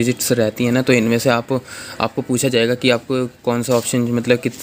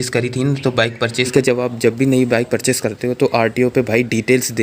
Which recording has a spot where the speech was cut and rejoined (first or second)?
second